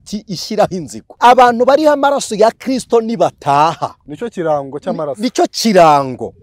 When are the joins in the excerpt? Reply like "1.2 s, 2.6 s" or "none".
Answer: 1.0 s